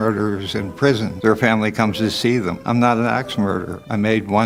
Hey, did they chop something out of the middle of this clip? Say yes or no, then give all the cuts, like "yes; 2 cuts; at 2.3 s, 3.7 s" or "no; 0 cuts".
no; 0 cuts